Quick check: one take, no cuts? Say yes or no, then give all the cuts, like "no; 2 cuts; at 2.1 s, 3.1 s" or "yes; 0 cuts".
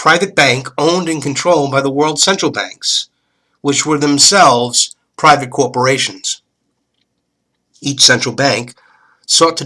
yes; 0 cuts